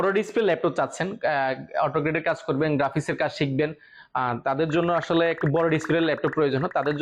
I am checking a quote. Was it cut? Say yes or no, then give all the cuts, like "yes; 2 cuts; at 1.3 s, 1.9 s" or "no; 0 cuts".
no; 0 cuts